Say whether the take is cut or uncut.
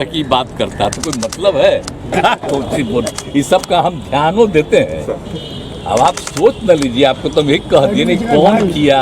cut